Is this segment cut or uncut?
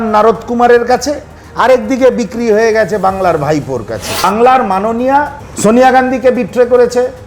cut